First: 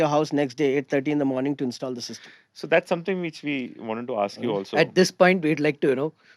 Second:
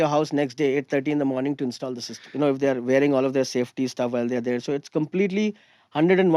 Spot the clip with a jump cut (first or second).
second